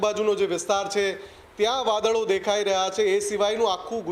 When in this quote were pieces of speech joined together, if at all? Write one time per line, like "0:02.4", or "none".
none